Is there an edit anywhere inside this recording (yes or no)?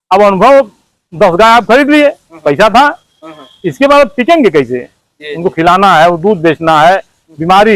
no